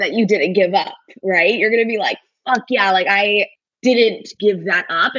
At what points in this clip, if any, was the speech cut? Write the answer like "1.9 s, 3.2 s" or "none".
3.6 s